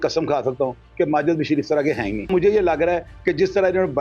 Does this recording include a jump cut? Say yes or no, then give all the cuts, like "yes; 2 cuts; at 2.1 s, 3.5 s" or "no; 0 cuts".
yes; 1 cut; at 2.3 s